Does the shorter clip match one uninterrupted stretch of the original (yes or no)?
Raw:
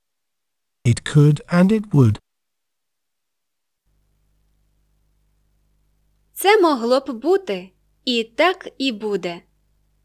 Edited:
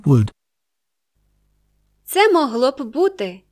no